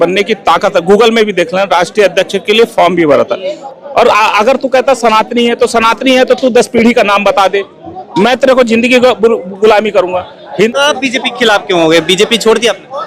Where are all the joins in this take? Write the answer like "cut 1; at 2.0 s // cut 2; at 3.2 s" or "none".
cut 1; at 3.6 s // cut 2; at 10.7 s